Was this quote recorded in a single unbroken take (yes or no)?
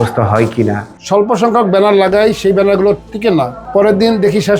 no